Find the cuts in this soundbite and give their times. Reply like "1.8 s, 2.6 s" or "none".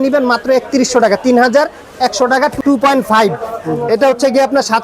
2.6 s